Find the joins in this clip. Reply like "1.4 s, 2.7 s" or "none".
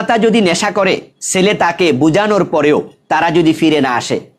1.2 s, 3.0 s